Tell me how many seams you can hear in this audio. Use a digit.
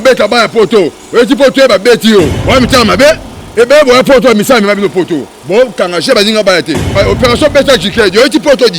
2